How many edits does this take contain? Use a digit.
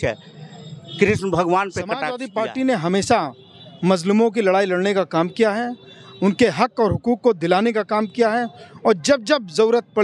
1